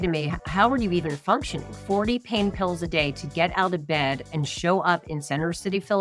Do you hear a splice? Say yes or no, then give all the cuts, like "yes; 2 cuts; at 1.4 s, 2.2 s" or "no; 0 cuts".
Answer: no; 0 cuts